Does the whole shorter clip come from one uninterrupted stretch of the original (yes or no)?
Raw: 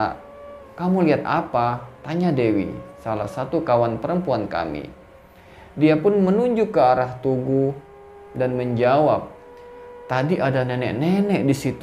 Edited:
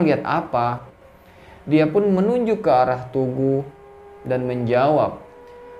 no